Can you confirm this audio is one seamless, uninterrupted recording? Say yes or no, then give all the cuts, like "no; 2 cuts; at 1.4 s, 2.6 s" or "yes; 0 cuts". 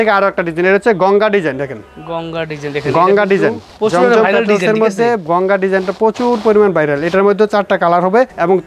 yes; 0 cuts